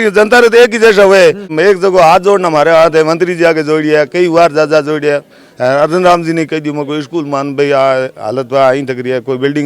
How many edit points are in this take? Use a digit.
1